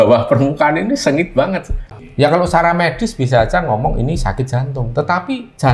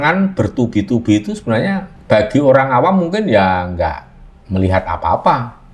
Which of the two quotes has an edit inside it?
first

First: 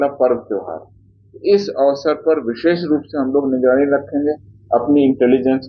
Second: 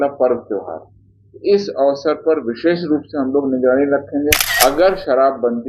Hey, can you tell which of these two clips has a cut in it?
second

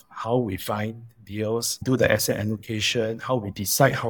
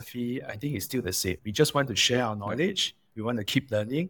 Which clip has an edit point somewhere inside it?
first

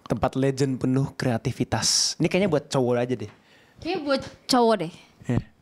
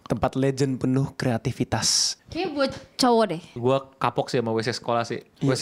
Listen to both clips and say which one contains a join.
second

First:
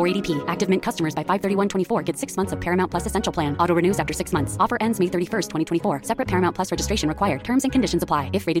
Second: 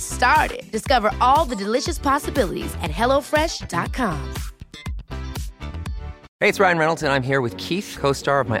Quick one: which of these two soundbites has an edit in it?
second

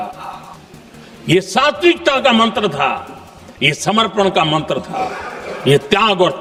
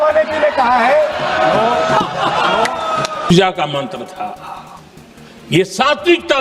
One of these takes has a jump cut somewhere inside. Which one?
second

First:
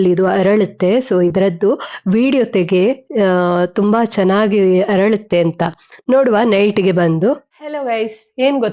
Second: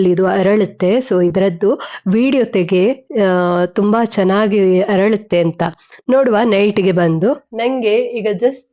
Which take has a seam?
second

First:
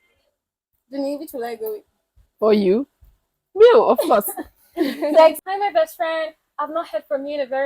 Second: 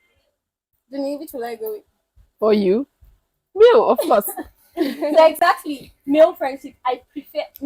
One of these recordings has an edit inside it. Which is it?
first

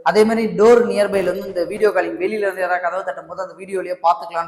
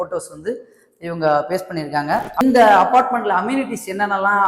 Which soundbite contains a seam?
second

